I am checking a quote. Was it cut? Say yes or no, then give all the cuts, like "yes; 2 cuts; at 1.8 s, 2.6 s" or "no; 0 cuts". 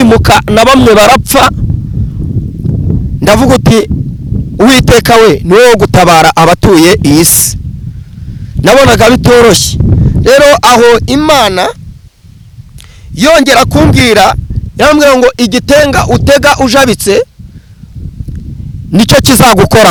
no; 0 cuts